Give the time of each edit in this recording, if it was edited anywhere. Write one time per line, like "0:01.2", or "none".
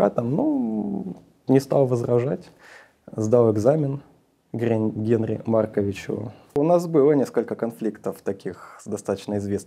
0:06.6